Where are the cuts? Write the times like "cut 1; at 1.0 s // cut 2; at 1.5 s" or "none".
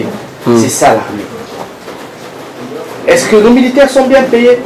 none